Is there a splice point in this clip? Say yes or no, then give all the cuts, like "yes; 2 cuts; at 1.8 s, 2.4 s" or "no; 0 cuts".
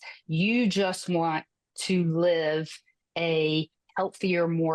no; 0 cuts